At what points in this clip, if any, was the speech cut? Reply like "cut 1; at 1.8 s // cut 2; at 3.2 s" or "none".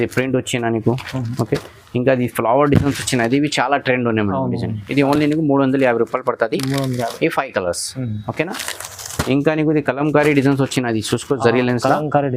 none